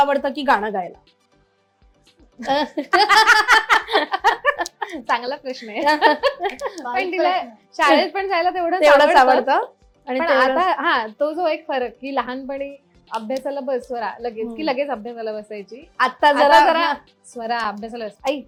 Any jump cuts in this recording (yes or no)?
no